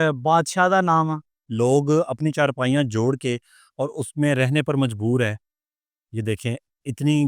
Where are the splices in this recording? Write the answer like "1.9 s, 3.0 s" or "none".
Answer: 1.4 s

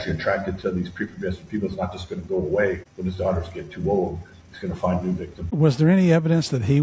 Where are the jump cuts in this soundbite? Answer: 2.9 s, 5.5 s

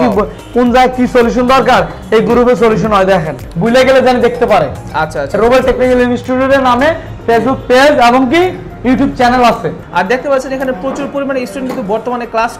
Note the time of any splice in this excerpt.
3.5 s, 9.8 s

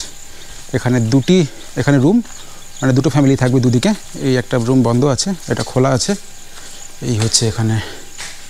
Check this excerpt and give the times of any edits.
none

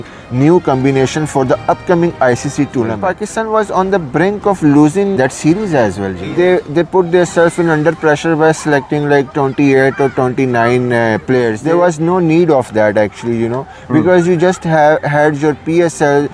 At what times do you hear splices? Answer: 3.0 s, 5.1 s, 6.1 s

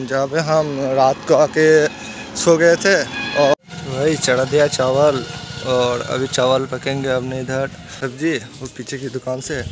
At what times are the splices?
3.5 s, 8.0 s

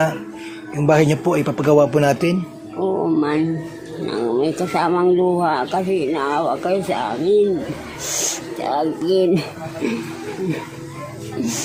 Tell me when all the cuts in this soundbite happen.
none

